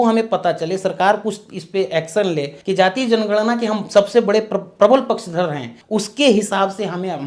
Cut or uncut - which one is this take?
cut